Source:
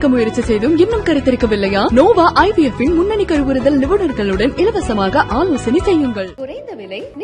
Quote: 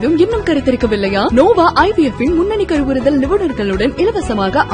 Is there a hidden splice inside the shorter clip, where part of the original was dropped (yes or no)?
no